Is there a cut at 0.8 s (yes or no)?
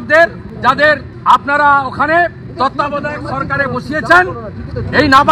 yes